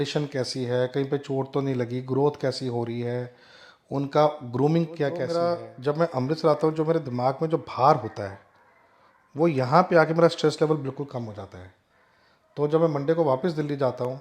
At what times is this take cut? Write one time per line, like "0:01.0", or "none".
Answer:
0:05.2